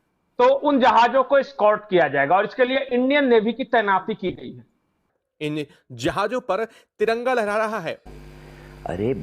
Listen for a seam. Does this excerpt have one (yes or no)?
yes